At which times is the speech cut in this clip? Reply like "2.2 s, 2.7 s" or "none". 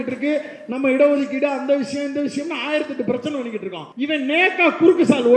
3.8 s